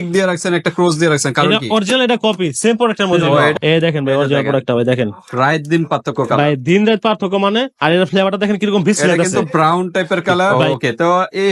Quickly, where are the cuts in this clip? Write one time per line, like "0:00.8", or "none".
0:03.5
0:10.6